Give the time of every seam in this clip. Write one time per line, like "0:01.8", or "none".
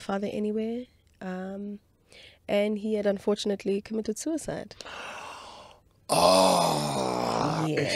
none